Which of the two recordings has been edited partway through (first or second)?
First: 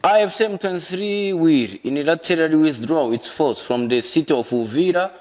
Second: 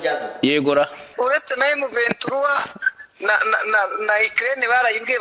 second